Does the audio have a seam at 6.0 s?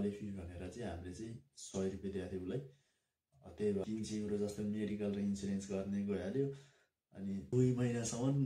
no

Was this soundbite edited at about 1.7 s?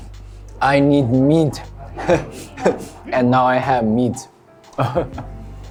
no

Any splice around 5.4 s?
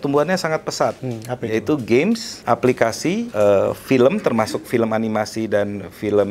no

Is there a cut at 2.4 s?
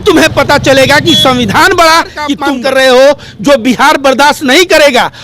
yes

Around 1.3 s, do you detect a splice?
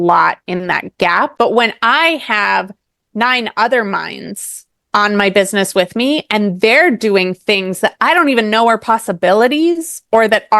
yes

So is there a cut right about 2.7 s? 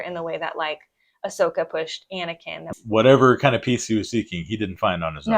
yes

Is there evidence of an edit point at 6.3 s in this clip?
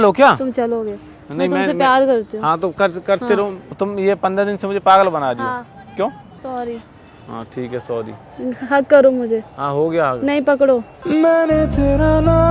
yes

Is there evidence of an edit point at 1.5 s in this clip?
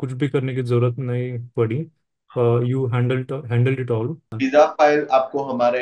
no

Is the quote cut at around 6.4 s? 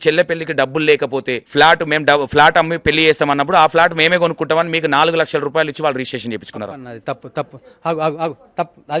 no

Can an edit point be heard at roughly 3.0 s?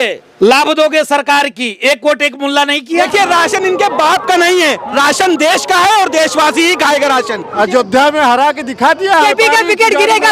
yes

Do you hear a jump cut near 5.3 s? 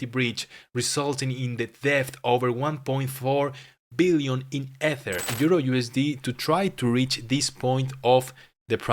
yes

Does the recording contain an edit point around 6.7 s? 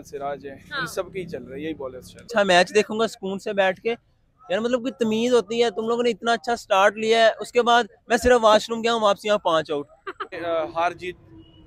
no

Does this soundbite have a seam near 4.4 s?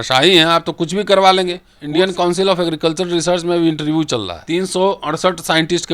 yes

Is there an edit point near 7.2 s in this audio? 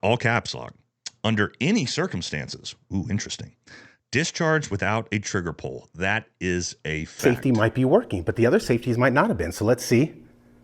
yes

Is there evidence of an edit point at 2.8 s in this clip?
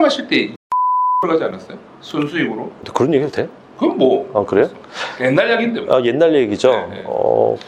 yes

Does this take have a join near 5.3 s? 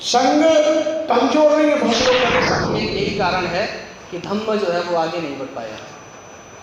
no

